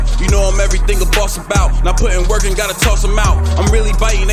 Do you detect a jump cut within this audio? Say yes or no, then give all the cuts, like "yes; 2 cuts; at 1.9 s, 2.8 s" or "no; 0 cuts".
no; 0 cuts